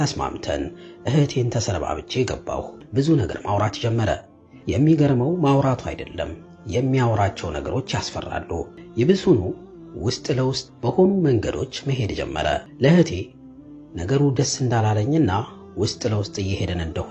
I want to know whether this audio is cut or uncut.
cut